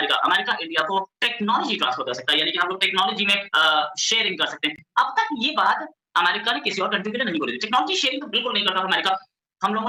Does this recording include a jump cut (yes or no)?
no